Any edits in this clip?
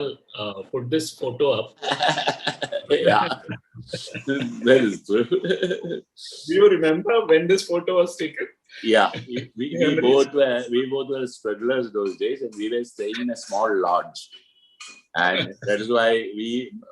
no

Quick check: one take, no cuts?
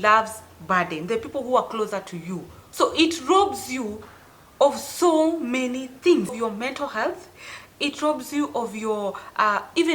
no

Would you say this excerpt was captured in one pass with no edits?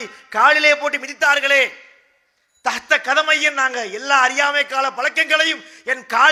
yes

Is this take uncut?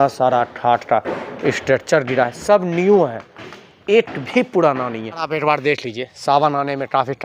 no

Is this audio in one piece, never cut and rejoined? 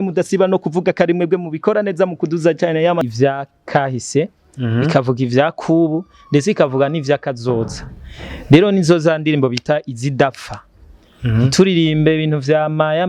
no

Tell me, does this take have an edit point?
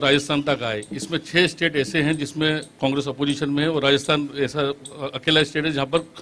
no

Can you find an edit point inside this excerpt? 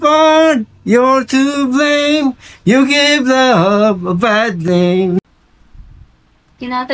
yes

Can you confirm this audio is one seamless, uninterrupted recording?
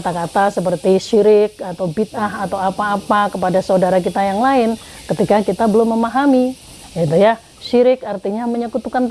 yes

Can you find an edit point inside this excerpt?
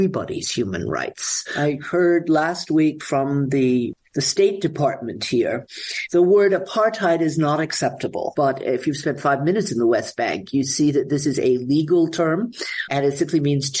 yes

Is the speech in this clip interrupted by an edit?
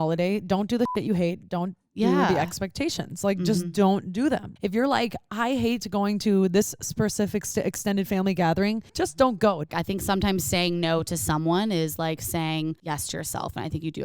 yes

